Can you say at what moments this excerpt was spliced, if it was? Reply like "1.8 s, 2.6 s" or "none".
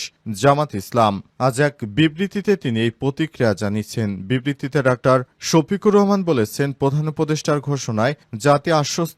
none